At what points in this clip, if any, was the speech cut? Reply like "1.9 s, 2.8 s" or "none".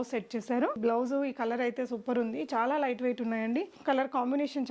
0.8 s, 3.8 s